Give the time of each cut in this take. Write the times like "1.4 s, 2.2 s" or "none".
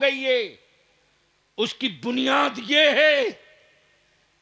none